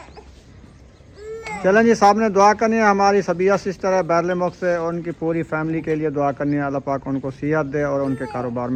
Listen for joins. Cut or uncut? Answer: uncut